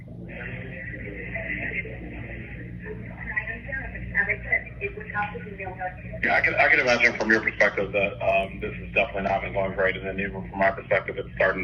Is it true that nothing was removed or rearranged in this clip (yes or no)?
yes